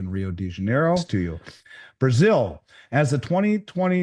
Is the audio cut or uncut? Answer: cut